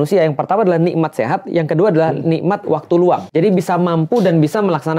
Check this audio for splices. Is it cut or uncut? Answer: cut